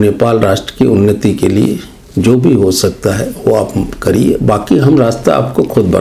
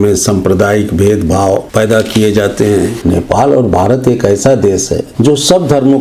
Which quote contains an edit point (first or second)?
second